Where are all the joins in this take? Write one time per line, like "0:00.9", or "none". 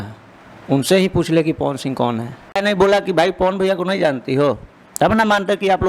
0:02.6